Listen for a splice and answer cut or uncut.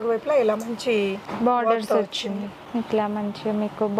cut